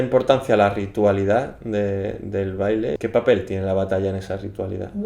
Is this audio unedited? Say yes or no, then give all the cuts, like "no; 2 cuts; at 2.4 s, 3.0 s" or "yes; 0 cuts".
no; 1 cut; at 3.0 s